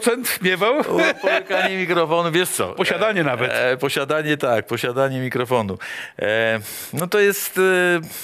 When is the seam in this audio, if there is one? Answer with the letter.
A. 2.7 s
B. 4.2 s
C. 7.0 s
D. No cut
D